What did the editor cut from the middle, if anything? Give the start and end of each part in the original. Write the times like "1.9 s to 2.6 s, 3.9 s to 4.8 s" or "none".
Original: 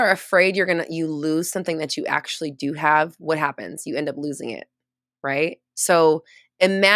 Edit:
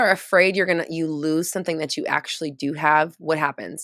none